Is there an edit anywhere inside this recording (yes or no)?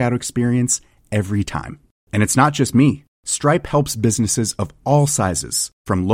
no